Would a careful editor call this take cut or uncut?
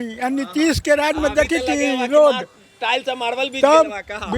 uncut